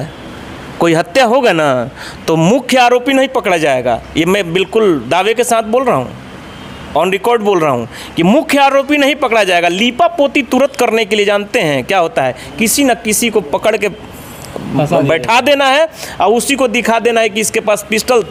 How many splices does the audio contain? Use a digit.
0